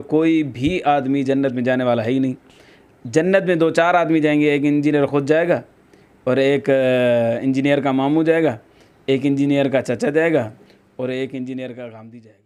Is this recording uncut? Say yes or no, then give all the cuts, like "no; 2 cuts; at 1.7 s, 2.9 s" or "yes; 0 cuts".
yes; 0 cuts